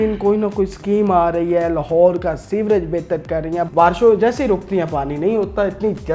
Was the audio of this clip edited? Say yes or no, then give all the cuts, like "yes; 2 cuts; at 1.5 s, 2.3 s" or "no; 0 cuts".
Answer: yes; 1 cut; at 3.7 s